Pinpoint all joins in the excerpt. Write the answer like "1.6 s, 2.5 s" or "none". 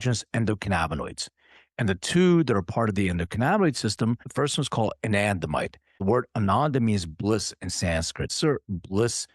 4.3 s, 6.0 s, 8.3 s